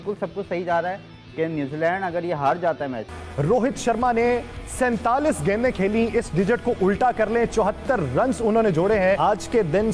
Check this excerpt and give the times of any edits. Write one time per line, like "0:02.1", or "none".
0:03.2